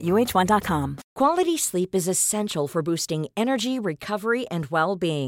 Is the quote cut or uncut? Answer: cut